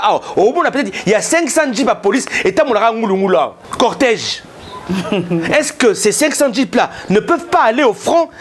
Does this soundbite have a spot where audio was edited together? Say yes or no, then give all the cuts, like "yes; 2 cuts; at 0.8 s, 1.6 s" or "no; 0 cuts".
yes; 1 cut; at 3.6 s